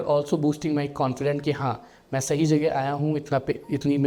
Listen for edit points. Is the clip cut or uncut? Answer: uncut